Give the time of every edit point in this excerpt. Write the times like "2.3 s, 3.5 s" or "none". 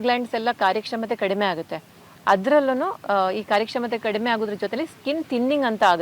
none